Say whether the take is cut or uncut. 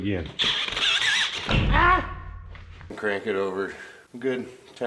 cut